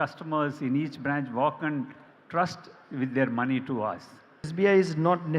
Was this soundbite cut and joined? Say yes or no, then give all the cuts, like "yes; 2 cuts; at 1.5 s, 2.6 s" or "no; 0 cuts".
yes; 1 cut; at 4.5 s